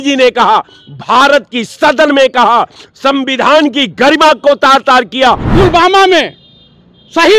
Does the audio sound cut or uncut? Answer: cut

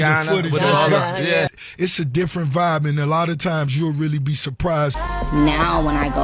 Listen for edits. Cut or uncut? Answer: cut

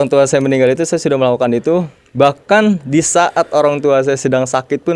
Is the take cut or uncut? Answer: uncut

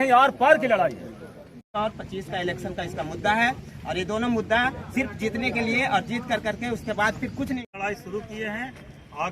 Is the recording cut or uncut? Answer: cut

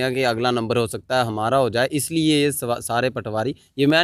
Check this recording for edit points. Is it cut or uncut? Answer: uncut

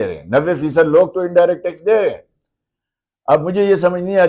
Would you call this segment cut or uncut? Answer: uncut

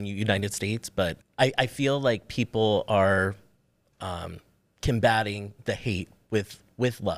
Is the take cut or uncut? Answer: cut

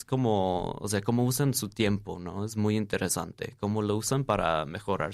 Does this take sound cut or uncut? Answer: uncut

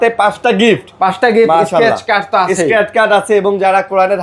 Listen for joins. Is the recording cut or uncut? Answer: uncut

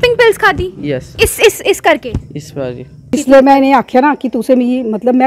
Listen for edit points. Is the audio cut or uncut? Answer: cut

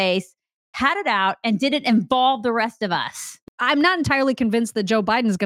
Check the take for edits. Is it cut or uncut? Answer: cut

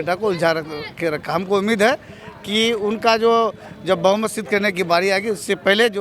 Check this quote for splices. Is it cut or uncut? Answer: uncut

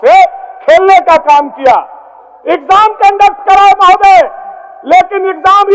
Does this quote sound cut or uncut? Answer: uncut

